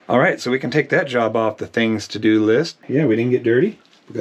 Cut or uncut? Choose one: cut